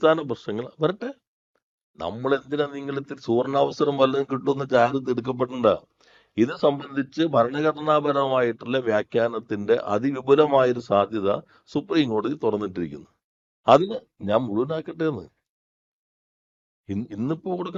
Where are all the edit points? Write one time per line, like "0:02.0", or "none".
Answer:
none